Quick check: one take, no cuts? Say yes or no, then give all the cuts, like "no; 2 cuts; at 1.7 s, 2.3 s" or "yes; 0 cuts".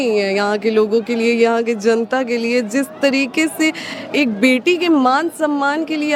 yes; 0 cuts